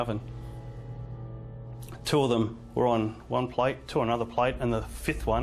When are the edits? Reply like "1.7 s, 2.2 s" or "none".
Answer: none